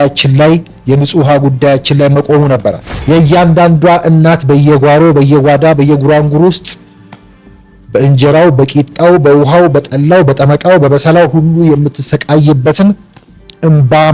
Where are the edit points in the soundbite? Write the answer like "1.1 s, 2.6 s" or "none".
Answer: 2.9 s